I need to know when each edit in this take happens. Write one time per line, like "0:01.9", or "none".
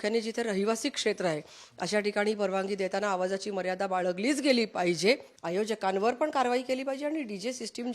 0:05.3